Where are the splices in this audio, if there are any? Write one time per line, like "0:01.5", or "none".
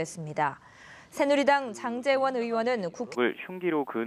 none